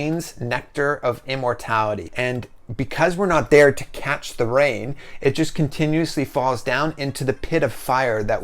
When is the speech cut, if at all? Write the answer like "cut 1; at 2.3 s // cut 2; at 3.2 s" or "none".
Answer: cut 1; at 2.1 s